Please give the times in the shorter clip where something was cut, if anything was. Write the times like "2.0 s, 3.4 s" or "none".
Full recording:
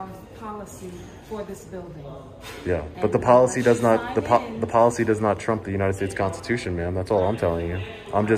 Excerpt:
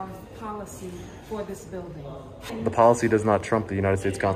2.6 s